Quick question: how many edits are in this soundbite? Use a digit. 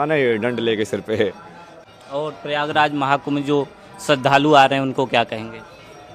0